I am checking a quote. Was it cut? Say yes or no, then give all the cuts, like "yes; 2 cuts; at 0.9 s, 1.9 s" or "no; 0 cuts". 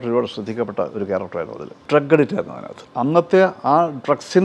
yes; 2 cuts; at 1.8 s, 2.8 s